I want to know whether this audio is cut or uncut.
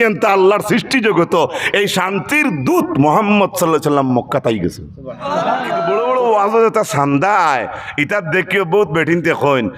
cut